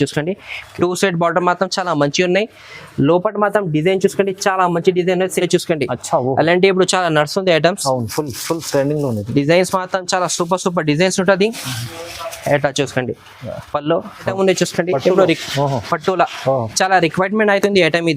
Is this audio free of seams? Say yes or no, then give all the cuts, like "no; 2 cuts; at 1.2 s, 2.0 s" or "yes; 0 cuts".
no; 2 cuts; at 5.4 s, 14.3 s